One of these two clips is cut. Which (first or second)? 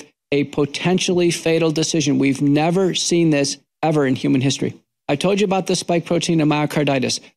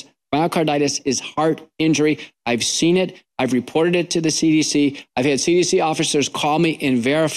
first